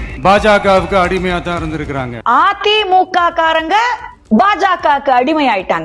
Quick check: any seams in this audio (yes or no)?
no